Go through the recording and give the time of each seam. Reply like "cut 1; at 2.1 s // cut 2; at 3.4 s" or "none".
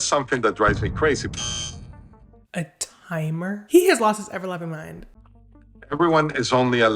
cut 1; at 5.1 s

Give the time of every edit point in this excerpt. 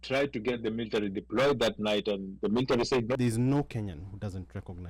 cut 1; at 3.1 s

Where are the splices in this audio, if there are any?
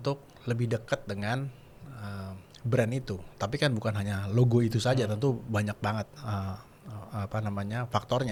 none

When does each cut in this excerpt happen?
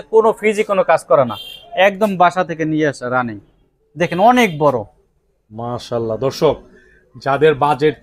none

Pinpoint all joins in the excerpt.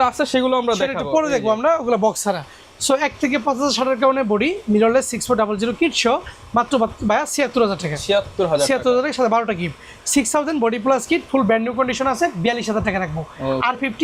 none

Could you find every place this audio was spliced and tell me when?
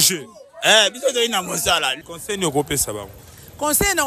cut 1; at 2.0 s

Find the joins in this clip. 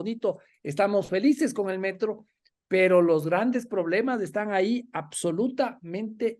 none

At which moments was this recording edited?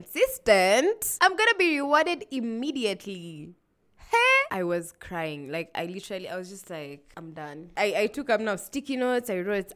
cut 1; at 1.1 s // cut 2; at 4.5 s // cut 3; at 7.6 s

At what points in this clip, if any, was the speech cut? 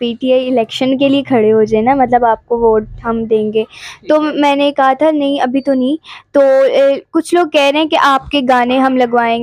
none

